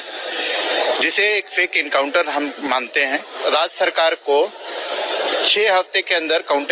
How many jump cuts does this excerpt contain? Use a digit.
1